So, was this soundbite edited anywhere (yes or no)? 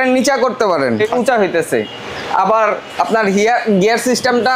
yes